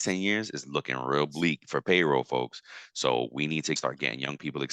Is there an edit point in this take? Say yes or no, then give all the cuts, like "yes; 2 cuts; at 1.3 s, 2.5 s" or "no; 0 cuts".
yes; 1 cut; at 3.8 s